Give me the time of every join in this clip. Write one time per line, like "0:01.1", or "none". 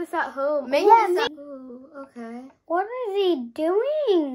0:01.3